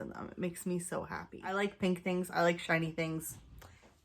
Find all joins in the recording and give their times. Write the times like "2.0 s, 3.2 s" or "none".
1.4 s